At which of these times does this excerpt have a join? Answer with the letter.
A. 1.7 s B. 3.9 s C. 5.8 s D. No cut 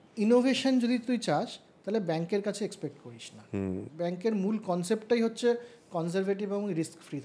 B